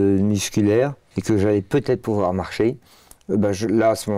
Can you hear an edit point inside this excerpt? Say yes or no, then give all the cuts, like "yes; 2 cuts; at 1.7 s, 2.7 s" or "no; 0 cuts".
yes; 1 cut; at 1.1 s